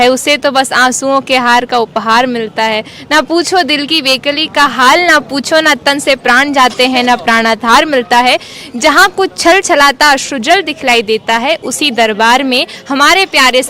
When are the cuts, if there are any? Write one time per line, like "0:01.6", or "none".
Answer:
none